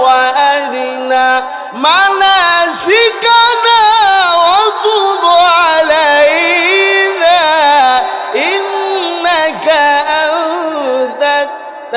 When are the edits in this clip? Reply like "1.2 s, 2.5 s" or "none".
none